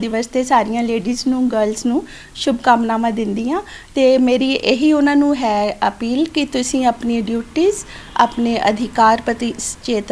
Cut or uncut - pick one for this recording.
uncut